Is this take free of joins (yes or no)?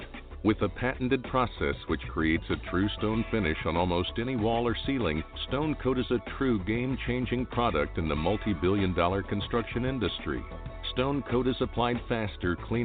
yes